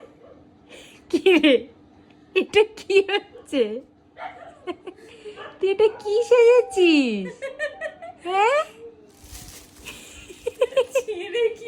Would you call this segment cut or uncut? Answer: uncut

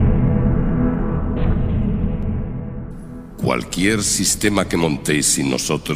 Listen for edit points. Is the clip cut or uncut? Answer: uncut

